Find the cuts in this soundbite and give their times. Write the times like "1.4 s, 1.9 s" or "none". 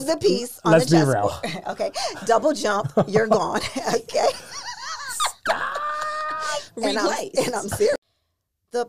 8.0 s